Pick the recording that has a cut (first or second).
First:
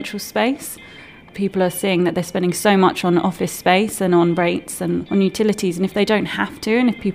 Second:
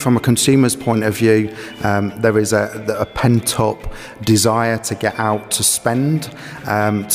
first